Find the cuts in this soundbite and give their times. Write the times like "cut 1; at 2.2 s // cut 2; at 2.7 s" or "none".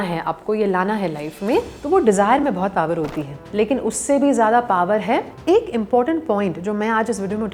cut 1; at 5.3 s